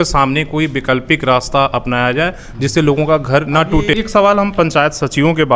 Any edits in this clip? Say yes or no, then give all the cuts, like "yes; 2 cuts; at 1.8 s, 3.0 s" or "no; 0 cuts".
yes; 1 cut; at 3.9 s